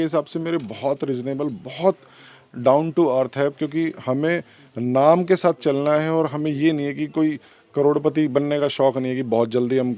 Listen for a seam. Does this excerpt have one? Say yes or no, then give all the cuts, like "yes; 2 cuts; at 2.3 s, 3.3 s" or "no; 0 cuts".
no; 0 cuts